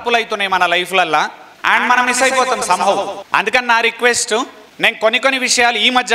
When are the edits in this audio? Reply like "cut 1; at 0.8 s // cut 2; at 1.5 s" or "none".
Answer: cut 1; at 1.5 s // cut 2; at 3.1 s // cut 3; at 4.6 s

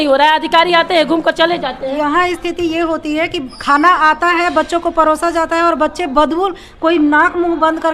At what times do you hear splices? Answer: cut 1; at 2.0 s

